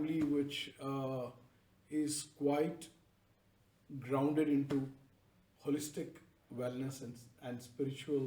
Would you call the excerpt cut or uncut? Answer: uncut